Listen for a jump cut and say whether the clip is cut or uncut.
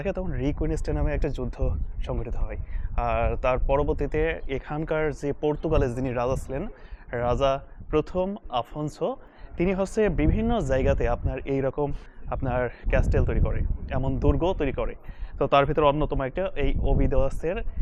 uncut